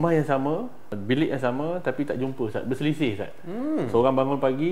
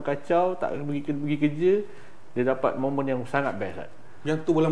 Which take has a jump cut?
first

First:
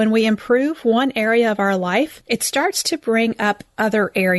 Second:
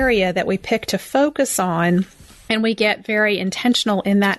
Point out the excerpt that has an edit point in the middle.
first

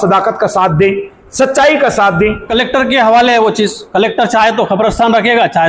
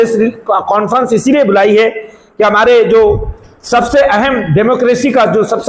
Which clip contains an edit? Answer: first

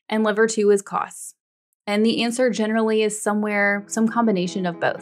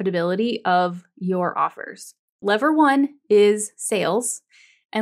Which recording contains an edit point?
second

